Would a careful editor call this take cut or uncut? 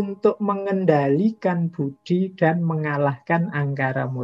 uncut